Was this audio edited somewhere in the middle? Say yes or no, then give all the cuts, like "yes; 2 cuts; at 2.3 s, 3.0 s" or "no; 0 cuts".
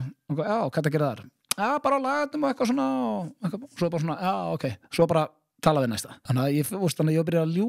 yes; 1 cut; at 6.2 s